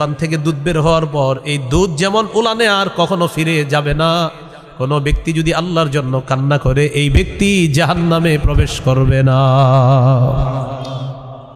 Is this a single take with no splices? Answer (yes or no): yes